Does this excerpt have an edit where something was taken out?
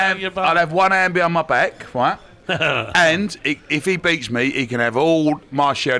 yes; 1 cut; at 2.3 s

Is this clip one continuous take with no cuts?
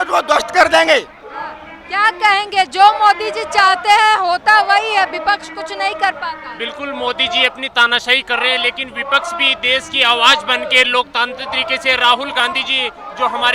yes; 0 cuts

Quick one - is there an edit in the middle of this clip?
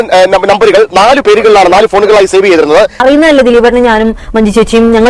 yes; 1 cut; at 3.0 s

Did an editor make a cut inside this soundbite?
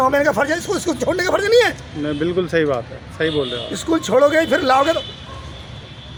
no; 0 cuts

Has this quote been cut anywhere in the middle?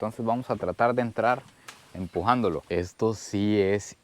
yes; 1 cut; at 2.6 s

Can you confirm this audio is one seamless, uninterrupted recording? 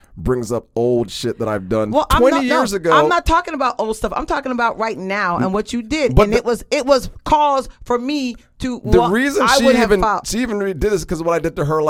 yes; 0 cuts

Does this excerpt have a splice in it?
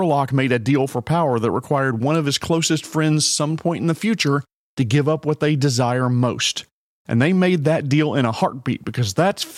no; 0 cuts

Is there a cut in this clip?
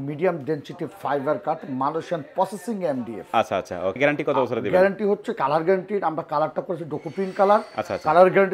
no; 0 cuts

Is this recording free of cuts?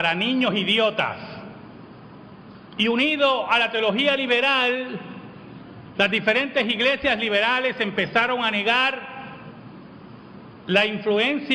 yes; 0 cuts

